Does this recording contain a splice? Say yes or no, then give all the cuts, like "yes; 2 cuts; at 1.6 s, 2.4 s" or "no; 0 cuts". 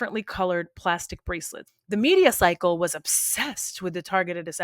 yes; 1 cut; at 1.5 s